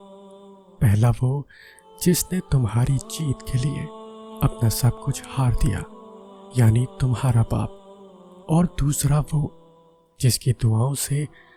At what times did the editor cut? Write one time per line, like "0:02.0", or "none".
none